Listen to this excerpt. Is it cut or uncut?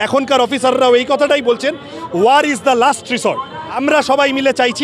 cut